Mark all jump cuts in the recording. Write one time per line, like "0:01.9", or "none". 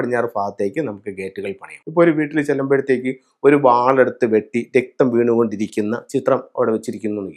0:01.8

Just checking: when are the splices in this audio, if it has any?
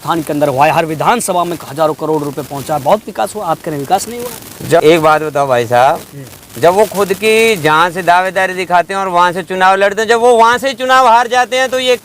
0:04.8

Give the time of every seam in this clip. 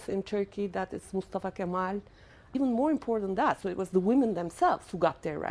none

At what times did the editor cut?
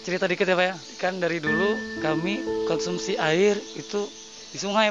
0:00.9
0:02.5

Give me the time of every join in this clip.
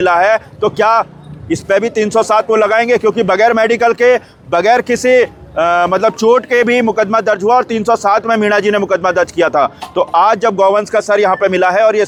none

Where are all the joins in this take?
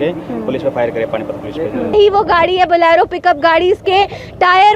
0:01.9

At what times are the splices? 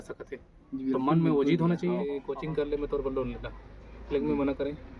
0:02.1

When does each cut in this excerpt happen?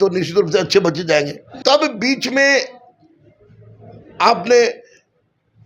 0:01.5

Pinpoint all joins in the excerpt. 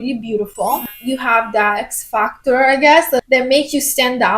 0:00.8
0:01.8
0:03.2

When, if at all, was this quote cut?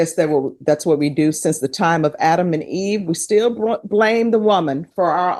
none

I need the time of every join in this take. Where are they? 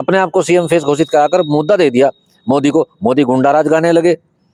none

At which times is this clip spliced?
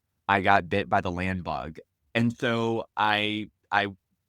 0:01.7

